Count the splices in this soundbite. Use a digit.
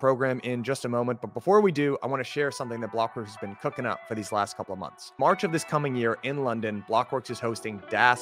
0